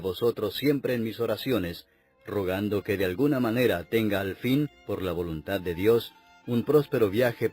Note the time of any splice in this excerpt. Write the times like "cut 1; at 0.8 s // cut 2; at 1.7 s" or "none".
cut 1; at 2.3 s